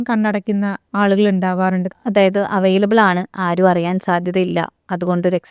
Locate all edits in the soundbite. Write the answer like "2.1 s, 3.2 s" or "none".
0.8 s, 1.9 s